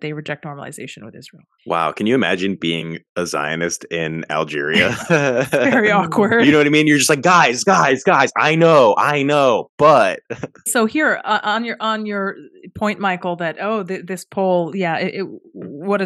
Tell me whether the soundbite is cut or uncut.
uncut